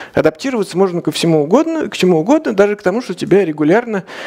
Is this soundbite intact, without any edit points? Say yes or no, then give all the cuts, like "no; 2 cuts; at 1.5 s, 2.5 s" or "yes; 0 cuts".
yes; 0 cuts